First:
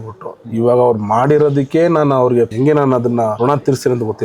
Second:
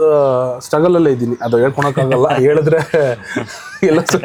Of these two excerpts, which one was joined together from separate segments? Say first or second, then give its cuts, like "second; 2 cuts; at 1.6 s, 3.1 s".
first; 2 cuts; at 2.5 s, 3.4 s